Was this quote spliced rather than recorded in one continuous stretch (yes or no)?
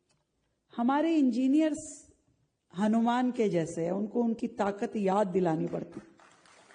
no